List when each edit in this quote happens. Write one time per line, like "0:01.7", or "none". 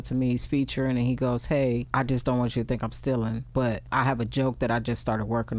0:01.9
0:03.5